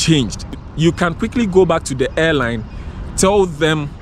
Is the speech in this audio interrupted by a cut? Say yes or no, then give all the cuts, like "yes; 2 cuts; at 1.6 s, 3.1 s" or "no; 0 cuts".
no; 0 cuts